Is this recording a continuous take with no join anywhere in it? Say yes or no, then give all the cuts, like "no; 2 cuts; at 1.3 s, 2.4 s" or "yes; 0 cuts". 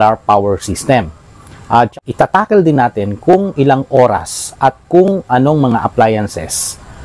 no; 1 cut; at 2.0 s